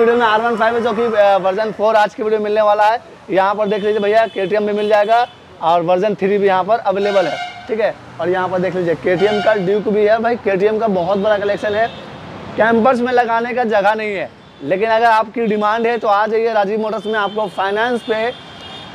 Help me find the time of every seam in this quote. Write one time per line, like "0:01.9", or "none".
none